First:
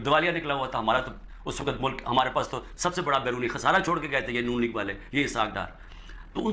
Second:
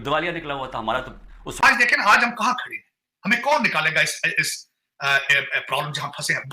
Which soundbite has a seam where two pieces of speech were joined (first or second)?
second